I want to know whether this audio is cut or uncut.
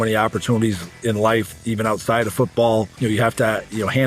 cut